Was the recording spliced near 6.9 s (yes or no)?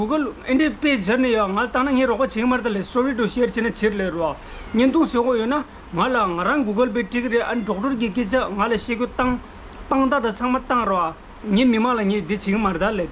no